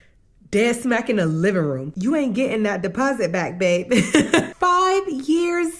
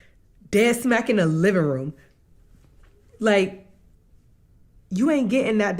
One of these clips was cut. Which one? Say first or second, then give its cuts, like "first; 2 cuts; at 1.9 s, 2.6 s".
first; 2 cuts; at 1.9 s, 4.5 s